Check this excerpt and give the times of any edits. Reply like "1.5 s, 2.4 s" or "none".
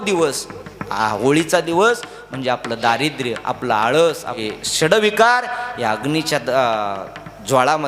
4.4 s